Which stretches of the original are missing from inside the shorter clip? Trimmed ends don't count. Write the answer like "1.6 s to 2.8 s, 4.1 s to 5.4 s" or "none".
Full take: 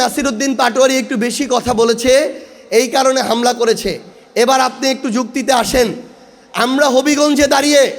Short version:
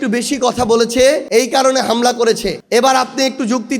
2.3 s to 2.6 s, 3.9 s to 4.2 s